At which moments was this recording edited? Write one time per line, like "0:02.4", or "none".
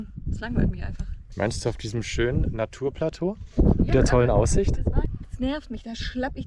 0:05.2